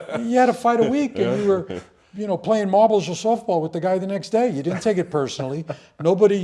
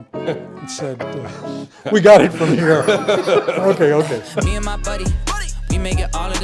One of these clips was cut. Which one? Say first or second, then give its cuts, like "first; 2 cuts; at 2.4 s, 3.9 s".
second; 1 cut; at 4.3 s